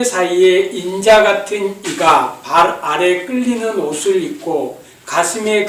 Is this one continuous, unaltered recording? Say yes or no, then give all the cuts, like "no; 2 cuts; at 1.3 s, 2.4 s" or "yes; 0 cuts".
yes; 0 cuts